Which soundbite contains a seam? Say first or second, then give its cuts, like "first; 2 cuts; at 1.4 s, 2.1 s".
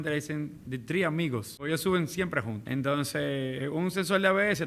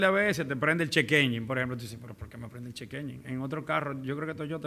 first; 2 cuts; at 1.6 s, 2.6 s